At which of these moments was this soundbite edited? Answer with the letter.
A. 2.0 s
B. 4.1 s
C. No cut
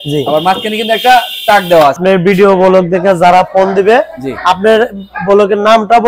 A